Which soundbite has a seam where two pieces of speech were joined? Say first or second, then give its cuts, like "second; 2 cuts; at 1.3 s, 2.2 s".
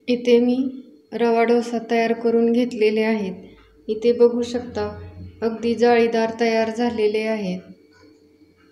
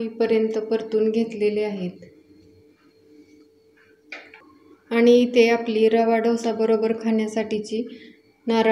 second; 1 cut; at 4.5 s